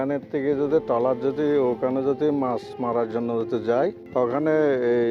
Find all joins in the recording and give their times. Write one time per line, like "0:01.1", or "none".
0:04.0